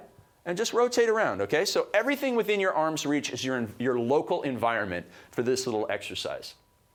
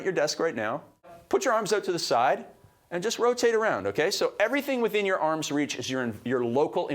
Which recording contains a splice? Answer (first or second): second